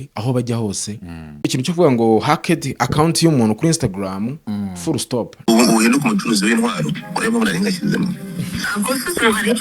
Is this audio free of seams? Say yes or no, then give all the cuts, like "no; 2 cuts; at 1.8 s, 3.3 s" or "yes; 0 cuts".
no; 2 cuts; at 1.4 s, 5.4 s